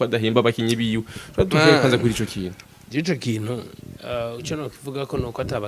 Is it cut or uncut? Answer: uncut